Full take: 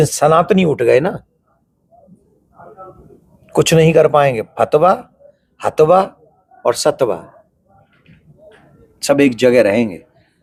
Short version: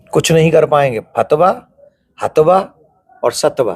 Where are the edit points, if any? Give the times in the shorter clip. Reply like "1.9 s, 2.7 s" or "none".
none